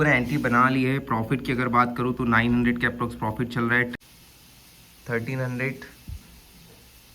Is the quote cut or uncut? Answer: cut